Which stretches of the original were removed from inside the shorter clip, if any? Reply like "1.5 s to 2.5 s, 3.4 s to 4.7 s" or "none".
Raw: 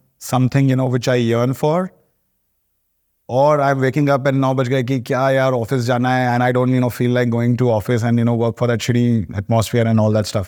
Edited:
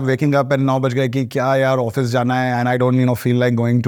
none